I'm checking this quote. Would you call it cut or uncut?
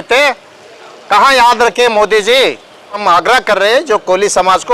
cut